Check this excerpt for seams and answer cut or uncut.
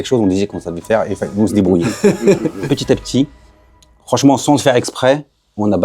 cut